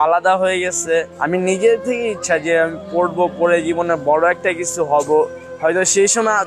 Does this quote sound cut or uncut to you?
cut